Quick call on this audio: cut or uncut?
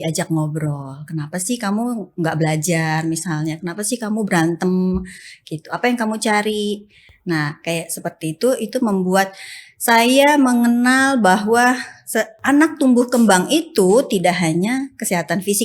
uncut